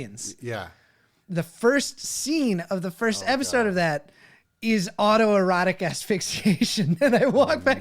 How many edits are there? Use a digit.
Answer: 1